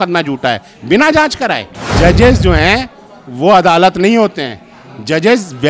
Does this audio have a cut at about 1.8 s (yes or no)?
yes